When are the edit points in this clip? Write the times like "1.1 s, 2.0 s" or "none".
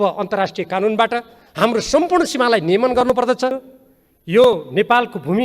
3.7 s